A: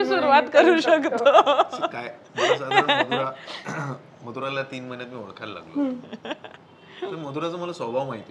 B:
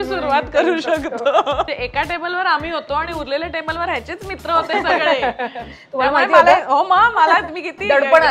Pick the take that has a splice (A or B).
B